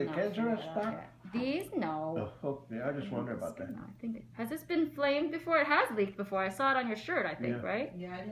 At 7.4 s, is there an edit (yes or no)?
yes